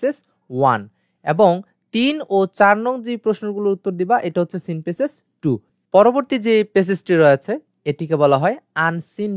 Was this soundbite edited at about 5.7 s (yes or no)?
yes